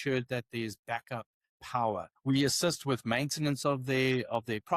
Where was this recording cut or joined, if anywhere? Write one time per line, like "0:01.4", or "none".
0:02.1